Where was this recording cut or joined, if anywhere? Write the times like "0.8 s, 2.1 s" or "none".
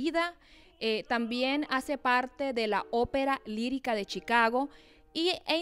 1.8 s